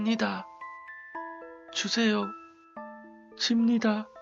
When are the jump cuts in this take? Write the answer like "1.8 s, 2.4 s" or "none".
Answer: none